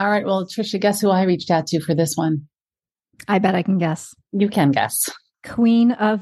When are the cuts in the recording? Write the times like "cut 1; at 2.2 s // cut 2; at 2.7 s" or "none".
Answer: none